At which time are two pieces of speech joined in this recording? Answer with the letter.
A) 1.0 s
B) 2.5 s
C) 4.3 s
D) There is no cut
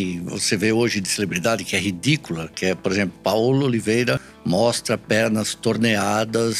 C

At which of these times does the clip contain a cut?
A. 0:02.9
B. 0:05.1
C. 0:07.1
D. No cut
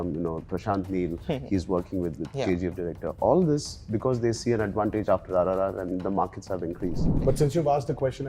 C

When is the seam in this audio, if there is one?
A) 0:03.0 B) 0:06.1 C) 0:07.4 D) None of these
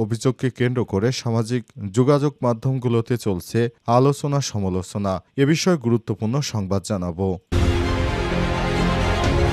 C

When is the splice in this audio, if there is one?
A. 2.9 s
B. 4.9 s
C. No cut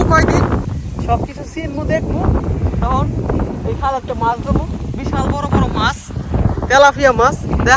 C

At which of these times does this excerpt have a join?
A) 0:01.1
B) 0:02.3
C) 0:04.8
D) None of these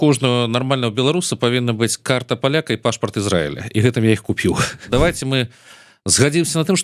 C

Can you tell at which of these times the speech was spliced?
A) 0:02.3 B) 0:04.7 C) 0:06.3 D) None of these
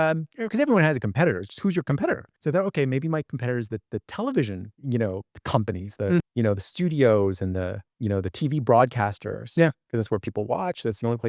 A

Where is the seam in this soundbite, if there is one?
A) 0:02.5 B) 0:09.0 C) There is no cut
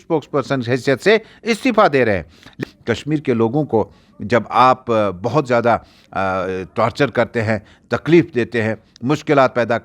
A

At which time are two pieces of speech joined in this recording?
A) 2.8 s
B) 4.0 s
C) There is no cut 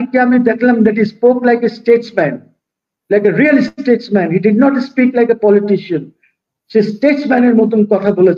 C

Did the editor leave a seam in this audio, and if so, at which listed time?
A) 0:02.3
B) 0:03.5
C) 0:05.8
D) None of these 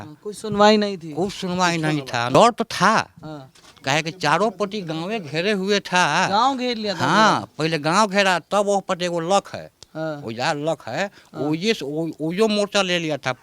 A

